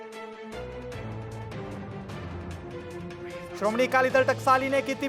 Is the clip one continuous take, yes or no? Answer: no